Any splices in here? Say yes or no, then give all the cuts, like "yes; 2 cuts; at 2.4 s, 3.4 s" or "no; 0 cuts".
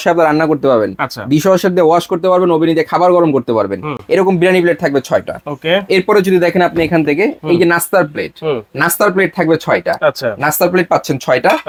no; 0 cuts